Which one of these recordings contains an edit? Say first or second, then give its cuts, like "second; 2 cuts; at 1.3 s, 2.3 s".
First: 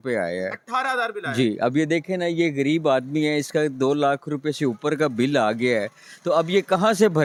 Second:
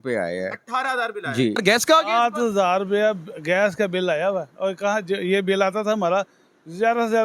second; 1 cut; at 1.6 s